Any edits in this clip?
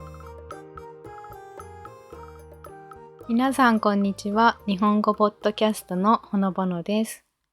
yes; 1 cut; at 3.3 s

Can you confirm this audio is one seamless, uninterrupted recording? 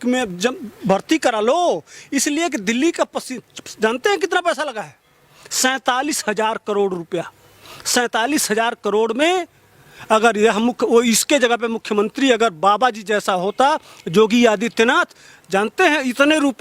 yes; 0 cuts

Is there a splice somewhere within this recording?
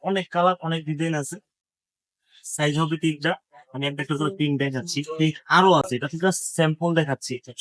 no; 0 cuts

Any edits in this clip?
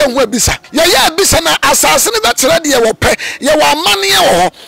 no; 0 cuts

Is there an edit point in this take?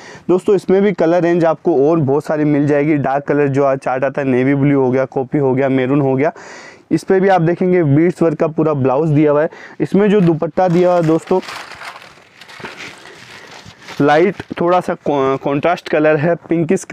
no; 0 cuts

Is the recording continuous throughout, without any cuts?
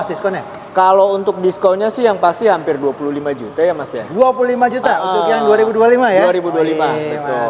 yes; 0 cuts

